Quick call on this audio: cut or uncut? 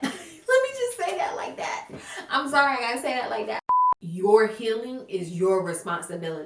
cut